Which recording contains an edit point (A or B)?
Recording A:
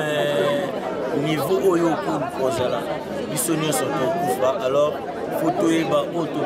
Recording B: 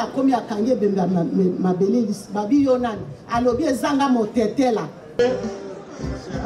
B